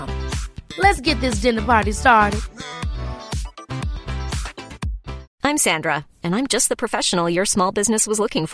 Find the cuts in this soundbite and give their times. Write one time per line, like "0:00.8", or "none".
0:05.3